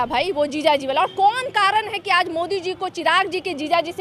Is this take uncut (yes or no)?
yes